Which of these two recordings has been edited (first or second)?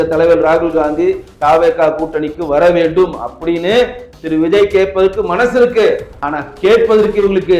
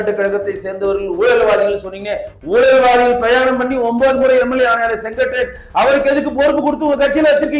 first